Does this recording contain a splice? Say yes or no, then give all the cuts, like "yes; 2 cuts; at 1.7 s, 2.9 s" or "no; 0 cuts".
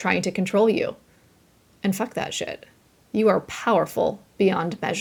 no; 0 cuts